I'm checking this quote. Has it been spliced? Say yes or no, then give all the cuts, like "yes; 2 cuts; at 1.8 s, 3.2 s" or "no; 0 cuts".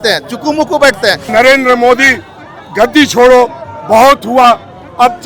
yes; 1 cut; at 1.2 s